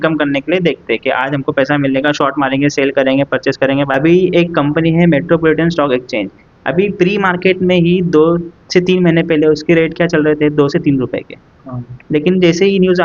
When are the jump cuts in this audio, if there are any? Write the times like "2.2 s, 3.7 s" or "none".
3.9 s